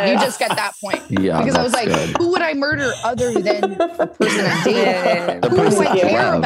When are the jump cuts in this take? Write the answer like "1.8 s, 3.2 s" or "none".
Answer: none

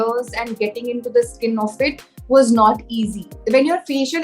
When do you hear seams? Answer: 3.3 s

